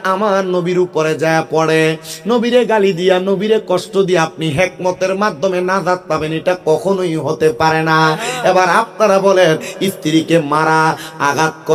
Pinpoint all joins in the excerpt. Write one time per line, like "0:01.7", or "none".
none